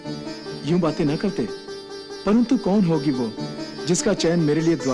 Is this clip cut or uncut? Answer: uncut